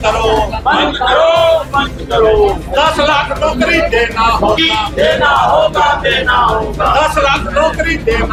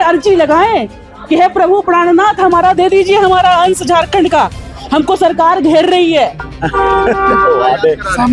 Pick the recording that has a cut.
second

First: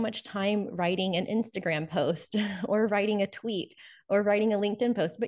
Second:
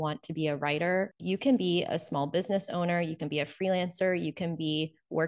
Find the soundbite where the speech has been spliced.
second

